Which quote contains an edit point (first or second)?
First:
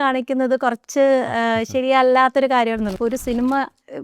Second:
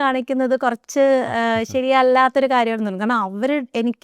first